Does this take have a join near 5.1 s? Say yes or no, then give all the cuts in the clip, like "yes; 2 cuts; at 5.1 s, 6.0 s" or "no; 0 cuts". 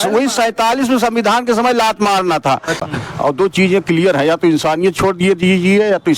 no; 1 cut; at 2.8 s